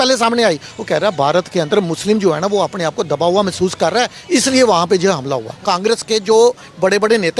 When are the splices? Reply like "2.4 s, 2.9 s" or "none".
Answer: 5.6 s